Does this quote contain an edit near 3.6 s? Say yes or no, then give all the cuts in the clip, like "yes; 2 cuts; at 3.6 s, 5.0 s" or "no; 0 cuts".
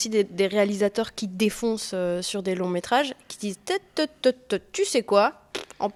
no; 0 cuts